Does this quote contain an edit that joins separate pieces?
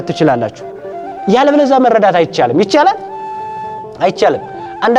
no; 0 cuts

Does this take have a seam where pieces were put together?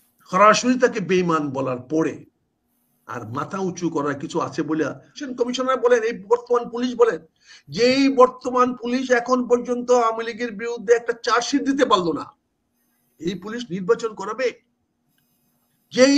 yes; 1 cut; at 5.2 s

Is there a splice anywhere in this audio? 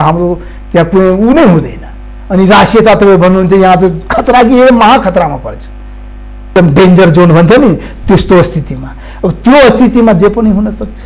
yes; 1 cut; at 6.5 s

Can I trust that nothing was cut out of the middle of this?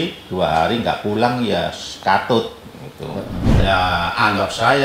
no; 1 cut; at 3.4 s

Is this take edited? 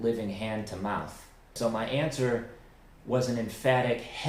yes; 1 cut; at 1.5 s

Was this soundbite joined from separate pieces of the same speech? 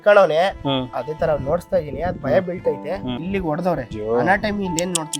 yes; 2 cuts; at 3.2 s, 3.9 s

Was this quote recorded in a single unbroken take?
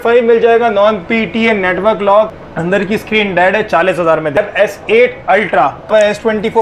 no; 3 cuts; at 2.5 s, 4.4 s, 5.9 s

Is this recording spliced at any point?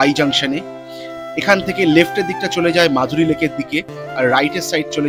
no; 0 cuts

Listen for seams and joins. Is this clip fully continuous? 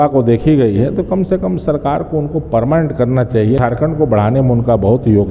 no; 1 cut; at 3.6 s

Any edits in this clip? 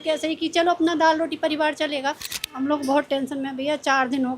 yes; 1 cut; at 2.3 s

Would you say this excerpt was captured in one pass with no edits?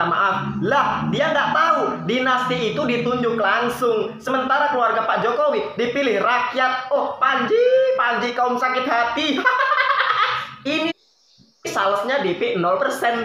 yes; 0 cuts

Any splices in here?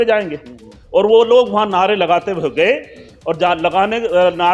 no; 0 cuts

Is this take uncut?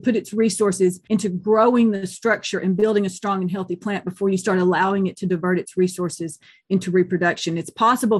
no; 1 cut; at 1.0 s

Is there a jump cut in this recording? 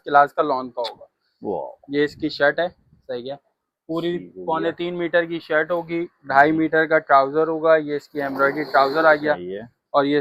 no; 0 cuts

